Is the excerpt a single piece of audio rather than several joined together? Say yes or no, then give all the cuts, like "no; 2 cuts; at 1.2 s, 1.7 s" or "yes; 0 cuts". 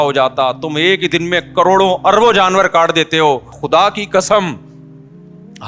no; 1 cut; at 3.6 s